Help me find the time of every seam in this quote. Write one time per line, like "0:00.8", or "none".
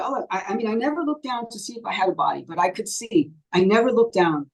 none